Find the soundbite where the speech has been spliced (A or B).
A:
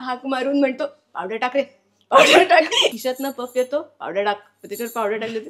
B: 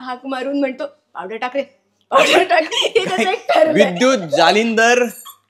A